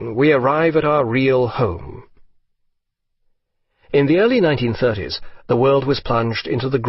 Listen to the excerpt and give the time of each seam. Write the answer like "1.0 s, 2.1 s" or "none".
5.1 s